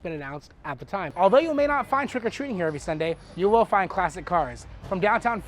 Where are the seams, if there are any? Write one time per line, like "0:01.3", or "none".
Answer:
0:01.1